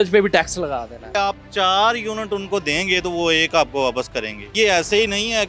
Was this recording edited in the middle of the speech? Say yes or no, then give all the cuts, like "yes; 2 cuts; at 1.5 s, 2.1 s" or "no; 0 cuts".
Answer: yes; 2 cuts; at 1.0 s, 4.5 s